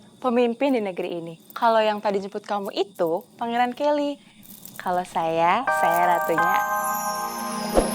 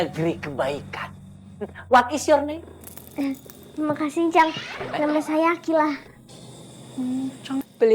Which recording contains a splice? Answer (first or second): first